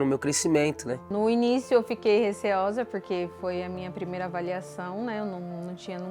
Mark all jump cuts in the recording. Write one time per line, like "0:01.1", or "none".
0:01.0